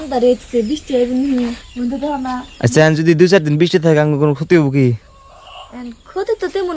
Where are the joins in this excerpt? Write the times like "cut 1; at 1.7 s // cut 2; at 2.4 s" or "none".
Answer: cut 1; at 1.6 s

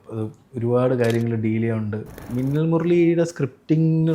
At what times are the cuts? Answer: cut 1; at 2.3 s

